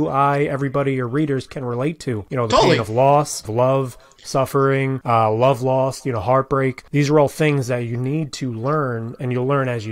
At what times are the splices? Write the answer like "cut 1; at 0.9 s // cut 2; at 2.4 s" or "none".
cut 1; at 2.2 s // cut 2; at 3.5 s // cut 3; at 5.0 s // cut 4; at 6.8 s